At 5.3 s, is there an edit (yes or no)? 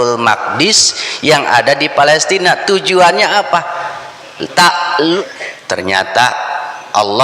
yes